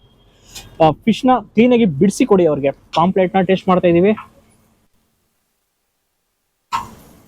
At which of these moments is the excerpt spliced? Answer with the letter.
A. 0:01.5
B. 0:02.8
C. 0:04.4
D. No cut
B